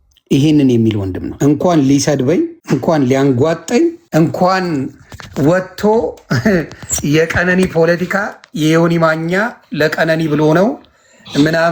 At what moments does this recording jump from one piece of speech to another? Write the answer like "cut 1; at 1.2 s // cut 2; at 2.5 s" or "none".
cut 1; at 1.2 s // cut 2; at 2.6 s // cut 3; at 4.0 s